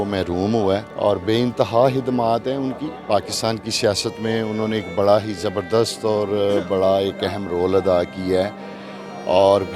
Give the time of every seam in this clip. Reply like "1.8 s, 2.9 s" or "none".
none